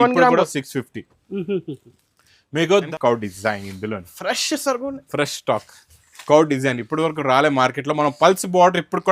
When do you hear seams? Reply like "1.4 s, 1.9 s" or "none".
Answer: 2.9 s